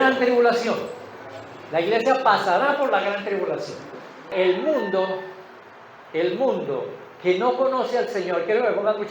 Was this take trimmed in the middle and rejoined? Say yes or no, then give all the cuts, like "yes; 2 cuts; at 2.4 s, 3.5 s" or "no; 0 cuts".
yes; 1 cut; at 4.3 s